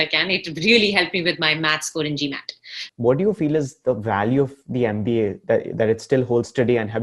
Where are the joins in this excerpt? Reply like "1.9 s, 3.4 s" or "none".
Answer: 2.8 s